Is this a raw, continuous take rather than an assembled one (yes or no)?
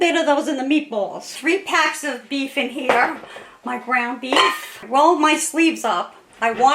no